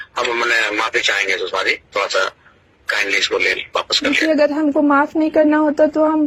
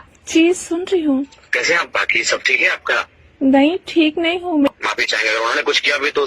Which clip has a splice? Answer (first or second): second